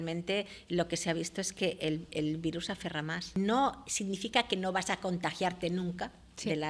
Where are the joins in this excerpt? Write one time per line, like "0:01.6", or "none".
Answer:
0:03.4